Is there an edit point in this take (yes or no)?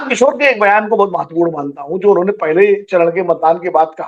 no